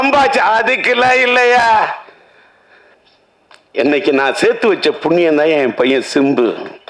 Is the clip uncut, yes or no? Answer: no